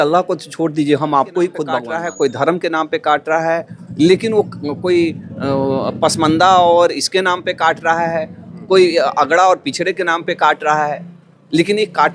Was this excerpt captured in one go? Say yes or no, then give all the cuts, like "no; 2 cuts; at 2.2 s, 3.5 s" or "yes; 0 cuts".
no; 1 cut; at 1.9 s